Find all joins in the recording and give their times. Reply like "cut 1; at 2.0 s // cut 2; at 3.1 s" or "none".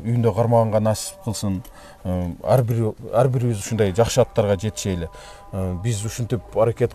none